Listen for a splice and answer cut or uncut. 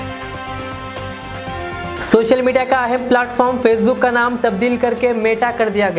cut